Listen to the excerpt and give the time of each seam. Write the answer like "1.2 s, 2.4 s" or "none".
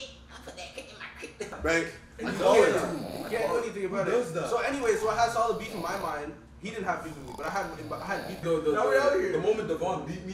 1.6 s, 8.4 s

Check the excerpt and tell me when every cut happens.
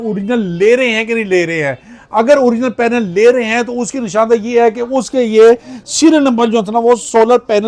none

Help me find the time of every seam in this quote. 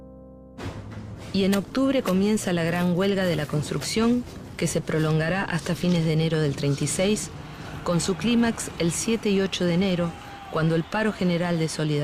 none

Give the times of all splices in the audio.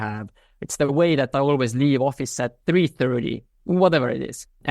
2.5 s, 3.6 s

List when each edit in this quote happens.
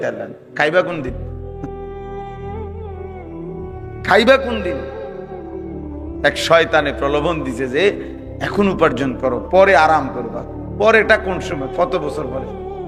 none

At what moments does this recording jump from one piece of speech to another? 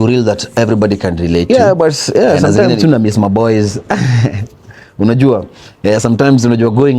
1.4 s

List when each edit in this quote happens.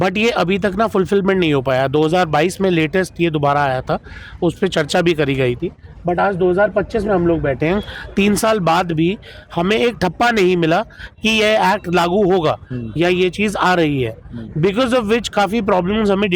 none

